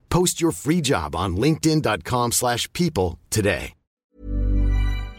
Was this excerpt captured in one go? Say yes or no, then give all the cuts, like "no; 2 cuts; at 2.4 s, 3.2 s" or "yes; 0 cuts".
no; 1 cut; at 4.0 s